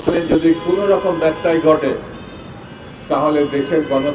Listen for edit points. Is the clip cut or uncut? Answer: uncut